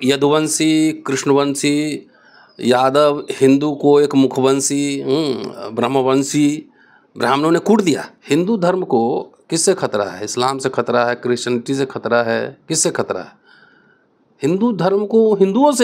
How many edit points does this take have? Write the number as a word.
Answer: one